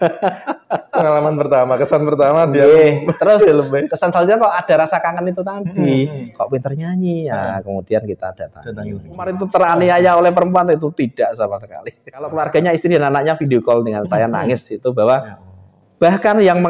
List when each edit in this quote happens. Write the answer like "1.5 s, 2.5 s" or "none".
9.4 s, 12.3 s